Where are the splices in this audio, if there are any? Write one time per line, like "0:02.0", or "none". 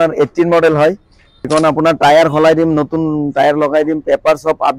0:01.5